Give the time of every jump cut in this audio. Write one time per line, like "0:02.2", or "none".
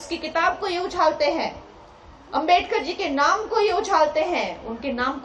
none